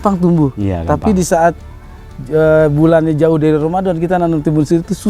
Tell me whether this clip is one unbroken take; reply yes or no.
yes